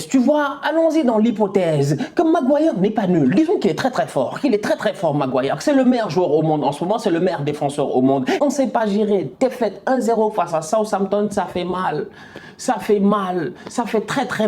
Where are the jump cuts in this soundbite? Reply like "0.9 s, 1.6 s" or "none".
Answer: 8.4 s